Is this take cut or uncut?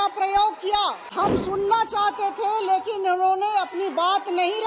cut